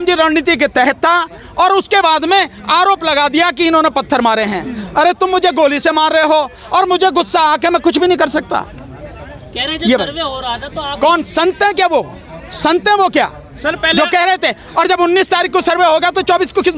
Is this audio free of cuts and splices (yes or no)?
yes